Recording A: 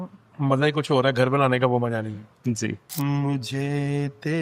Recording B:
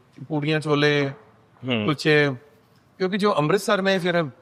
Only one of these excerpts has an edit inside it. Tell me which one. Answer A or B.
A